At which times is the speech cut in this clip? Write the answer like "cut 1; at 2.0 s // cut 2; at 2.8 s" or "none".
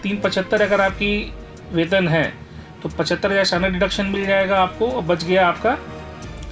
none